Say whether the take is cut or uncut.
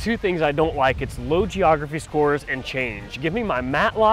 uncut